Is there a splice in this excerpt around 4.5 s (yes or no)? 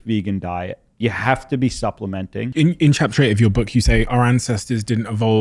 no